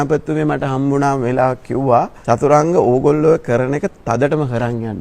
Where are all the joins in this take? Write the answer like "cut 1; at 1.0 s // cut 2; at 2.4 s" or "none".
cut 1; at 2.2 s